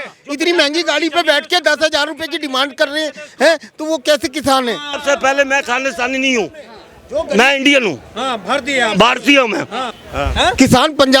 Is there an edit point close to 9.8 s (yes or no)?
yes